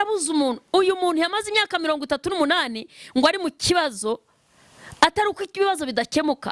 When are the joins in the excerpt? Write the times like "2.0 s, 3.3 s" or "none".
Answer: none

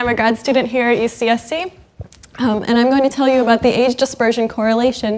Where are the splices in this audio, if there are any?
none

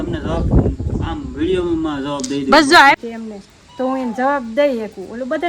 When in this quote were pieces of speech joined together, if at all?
3.0 s

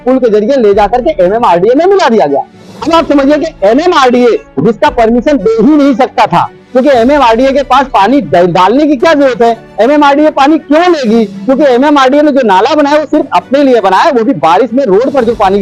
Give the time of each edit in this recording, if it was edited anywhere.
none

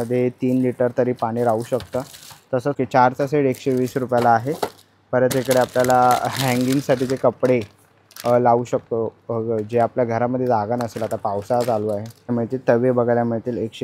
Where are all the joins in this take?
2.8 s, 12.3 s

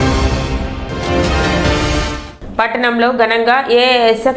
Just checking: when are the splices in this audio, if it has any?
2.2 s

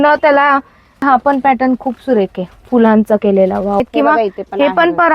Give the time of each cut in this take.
1.0 s, 3.8 s

